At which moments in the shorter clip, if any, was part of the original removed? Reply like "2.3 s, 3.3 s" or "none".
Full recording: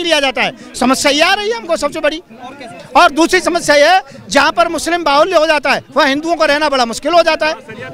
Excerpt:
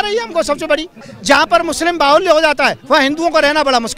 1.1 s

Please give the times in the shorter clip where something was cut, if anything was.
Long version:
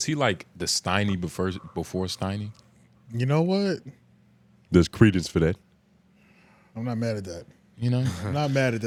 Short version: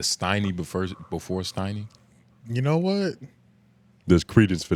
none

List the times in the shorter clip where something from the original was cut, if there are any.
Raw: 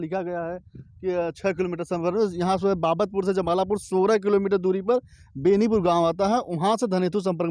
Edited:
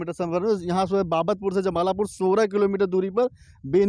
none

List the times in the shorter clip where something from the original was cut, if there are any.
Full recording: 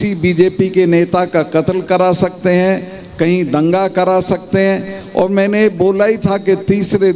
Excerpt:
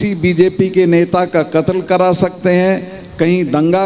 none

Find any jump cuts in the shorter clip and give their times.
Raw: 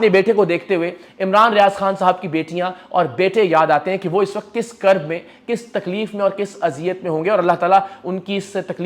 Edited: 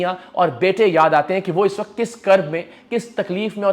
none

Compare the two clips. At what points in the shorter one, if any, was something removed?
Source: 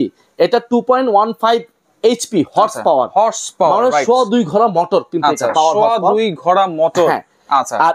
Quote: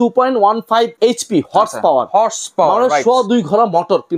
0.9 s

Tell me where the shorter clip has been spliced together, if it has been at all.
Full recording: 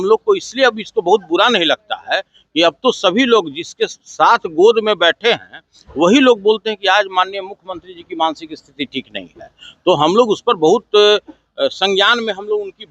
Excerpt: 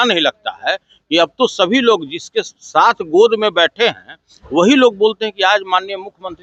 none

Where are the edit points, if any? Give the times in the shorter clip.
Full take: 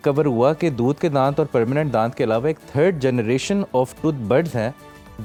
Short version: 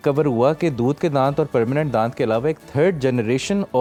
none

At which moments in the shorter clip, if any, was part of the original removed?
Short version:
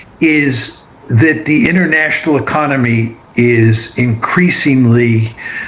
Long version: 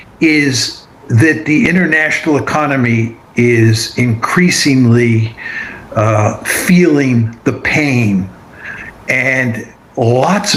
none

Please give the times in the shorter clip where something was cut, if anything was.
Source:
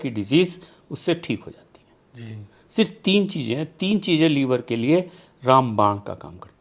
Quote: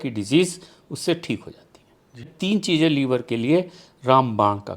2.3 s

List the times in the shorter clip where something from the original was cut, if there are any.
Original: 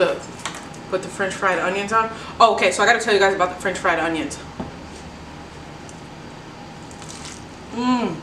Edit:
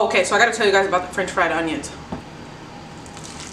2.2 s

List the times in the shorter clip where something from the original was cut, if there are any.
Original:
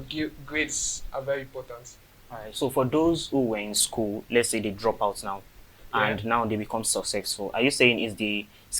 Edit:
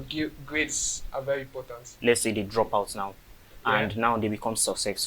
1.9 s

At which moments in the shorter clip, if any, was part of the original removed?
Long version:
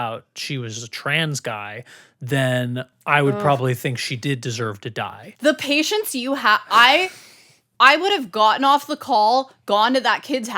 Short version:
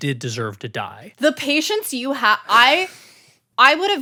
none

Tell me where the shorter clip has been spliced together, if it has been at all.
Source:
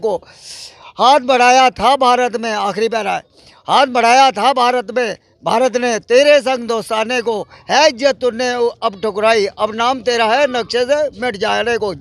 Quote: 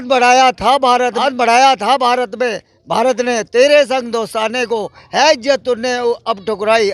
1.2 s

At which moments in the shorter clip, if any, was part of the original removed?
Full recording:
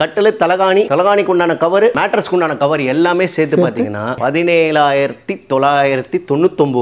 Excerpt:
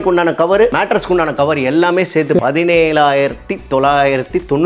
2.4 s

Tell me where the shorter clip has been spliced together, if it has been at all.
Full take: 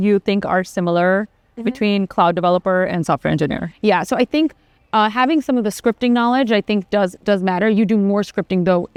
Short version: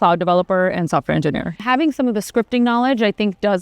1.6 s

